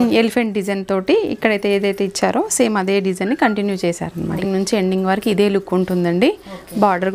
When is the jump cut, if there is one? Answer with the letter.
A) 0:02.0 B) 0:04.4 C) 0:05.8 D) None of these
B